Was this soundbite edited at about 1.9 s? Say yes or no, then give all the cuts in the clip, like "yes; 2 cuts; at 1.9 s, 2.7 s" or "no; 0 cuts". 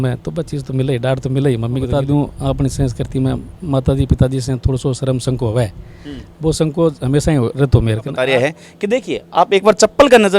yes; 2 cuts; at 1.9 s, 8.1 s